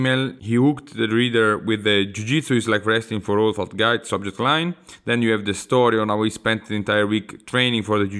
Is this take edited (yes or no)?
no